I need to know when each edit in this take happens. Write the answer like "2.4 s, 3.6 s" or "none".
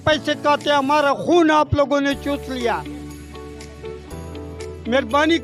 none